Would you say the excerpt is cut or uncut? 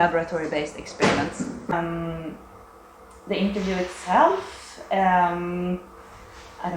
cut